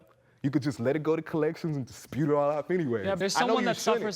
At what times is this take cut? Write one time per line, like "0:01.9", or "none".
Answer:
0:03.2

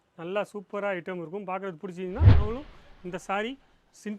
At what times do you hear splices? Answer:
0:02.4

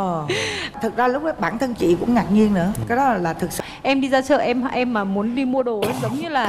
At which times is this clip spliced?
0:03.6

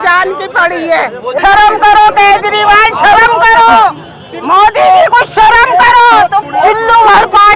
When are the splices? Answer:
0:01.4
0:06.4

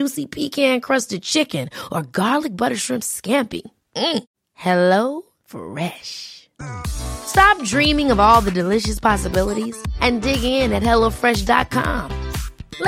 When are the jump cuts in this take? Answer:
none

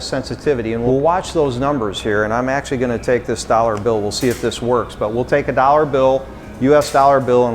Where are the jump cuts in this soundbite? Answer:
none

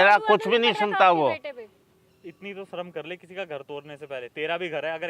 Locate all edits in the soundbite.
none

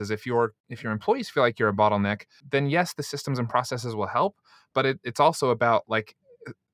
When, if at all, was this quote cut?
0:02.4

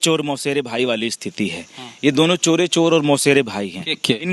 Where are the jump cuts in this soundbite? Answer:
none

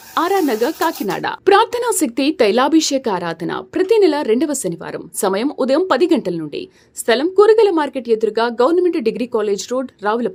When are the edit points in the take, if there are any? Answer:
none

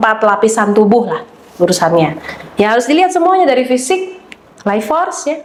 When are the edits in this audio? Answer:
none

